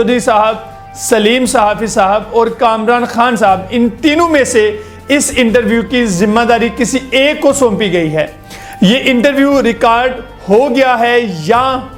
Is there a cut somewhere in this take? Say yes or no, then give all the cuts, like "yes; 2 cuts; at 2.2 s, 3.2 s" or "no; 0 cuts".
no; 0 cuts